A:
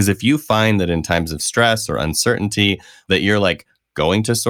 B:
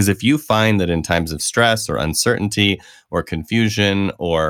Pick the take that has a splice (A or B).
A